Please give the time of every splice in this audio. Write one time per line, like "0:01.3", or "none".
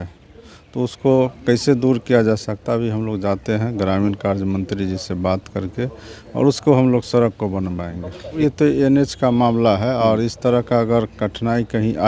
0:08.4